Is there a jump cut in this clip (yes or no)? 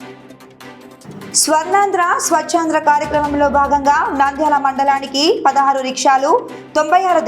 yes